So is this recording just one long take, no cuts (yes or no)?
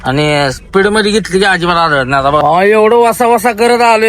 no